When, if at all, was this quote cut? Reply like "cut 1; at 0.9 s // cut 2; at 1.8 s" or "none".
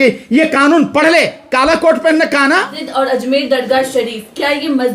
cut 1; at 2.8 s